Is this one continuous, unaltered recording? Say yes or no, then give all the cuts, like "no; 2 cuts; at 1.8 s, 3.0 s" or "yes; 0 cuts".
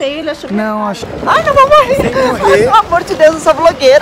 no; 1 cut; at 1.0 s